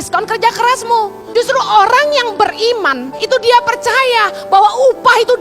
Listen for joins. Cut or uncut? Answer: cut